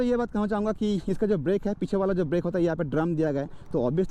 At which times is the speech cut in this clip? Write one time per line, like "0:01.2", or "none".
none